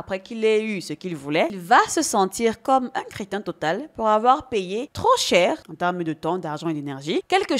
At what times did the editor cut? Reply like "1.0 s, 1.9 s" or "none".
1.5 s